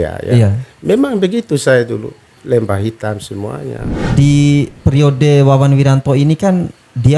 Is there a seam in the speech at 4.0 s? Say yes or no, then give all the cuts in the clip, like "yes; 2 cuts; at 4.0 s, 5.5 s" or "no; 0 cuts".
yes; 1 cut; at 4.0 s